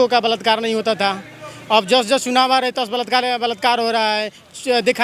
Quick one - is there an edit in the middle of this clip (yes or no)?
no